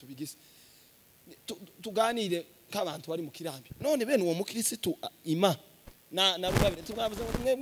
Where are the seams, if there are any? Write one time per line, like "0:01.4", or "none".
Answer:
none